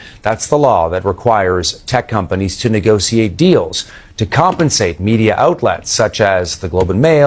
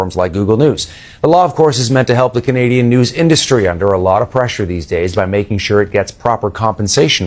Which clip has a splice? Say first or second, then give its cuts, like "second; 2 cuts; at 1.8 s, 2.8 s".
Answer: second; 1 cut; at 1.5 s